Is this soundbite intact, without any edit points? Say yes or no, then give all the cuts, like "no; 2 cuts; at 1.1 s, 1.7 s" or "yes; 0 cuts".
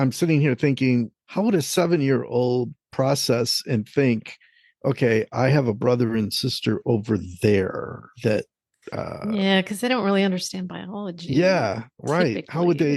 no; 1 cut; at 1.2 s